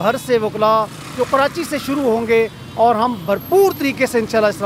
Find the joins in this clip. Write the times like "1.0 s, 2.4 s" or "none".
none